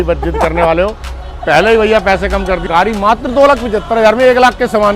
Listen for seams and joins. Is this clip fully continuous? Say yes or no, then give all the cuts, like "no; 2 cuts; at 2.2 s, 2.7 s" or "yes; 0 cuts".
no; 1 cut; at 2.6 s